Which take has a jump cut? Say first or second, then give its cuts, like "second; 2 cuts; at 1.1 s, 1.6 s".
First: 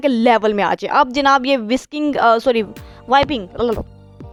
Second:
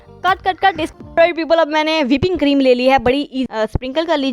second; 2 cuts; at 0.9 s, 3.4 s